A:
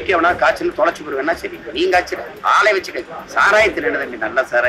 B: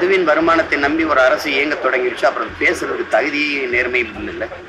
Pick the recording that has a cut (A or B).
A